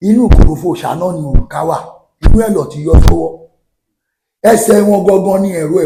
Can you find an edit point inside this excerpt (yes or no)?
no